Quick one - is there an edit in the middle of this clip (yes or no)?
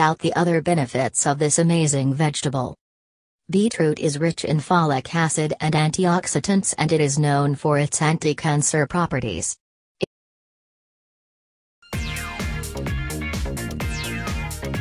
no